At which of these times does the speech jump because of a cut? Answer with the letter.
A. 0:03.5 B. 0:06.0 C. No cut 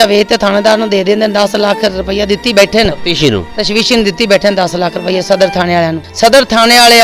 B